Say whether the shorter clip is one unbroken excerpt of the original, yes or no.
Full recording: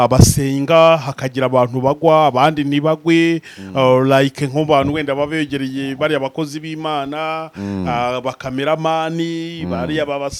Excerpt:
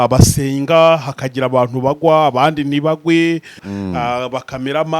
no